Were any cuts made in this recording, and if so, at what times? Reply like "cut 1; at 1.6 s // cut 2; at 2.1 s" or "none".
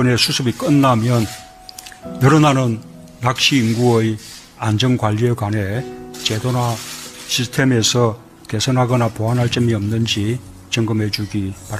cut 1; at 1.4 s